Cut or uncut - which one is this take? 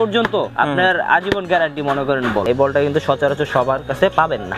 cut